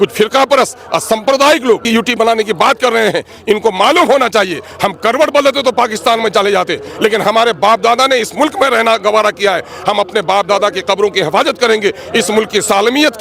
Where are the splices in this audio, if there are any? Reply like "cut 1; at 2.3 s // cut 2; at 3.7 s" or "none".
cut 1; at 1.8 s